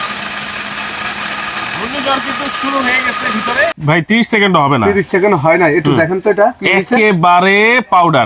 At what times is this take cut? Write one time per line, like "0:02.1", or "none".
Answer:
0:03.8

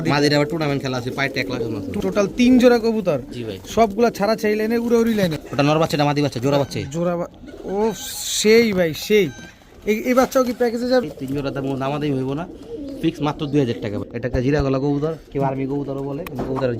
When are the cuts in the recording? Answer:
0:02.0
0:05.4
0:11.0
0:14.0

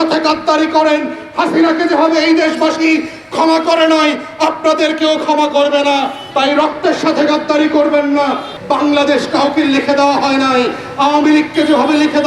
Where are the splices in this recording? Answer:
0:08.5

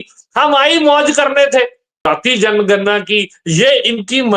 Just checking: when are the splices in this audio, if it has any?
0:02.1

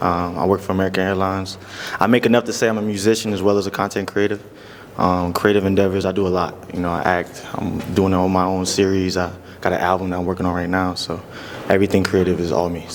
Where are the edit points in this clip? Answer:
none

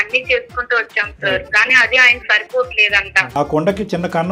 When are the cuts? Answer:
0:03.3

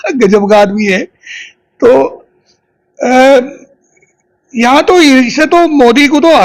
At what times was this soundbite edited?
none

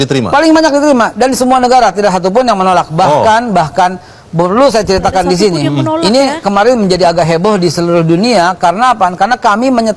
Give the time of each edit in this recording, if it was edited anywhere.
none

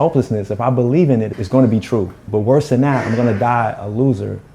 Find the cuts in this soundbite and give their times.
0:01.3
0:02.3

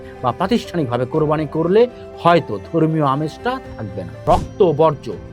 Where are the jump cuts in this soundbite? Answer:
0:04.2

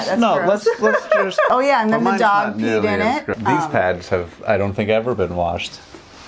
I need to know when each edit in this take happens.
0:01.5
0:03.4

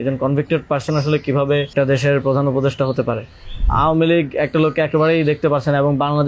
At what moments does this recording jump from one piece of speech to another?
0:01.7
0:03.6

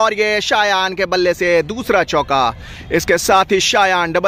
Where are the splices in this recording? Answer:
none

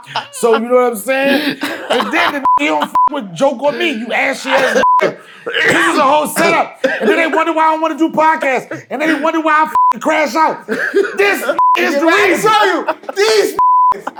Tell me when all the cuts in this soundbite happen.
none

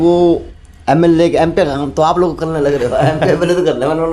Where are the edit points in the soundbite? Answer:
none

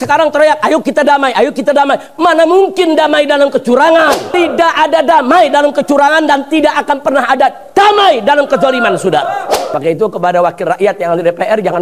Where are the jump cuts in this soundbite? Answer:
0:04.3
0:09.7

